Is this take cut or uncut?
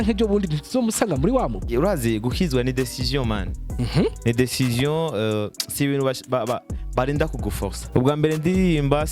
cut